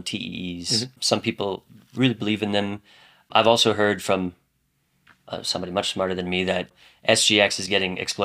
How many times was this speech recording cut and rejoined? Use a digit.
3